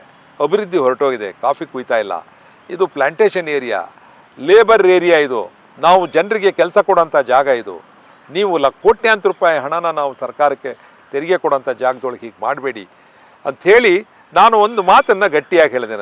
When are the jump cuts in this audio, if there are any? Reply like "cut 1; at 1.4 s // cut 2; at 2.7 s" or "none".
none